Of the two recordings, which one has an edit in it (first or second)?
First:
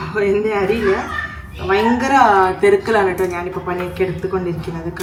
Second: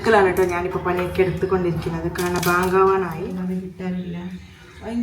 second